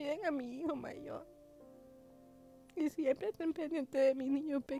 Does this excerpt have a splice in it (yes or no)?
yes